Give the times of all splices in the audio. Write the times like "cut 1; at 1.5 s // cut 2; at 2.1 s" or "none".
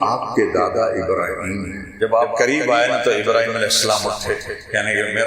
cut 1; at 1.8 s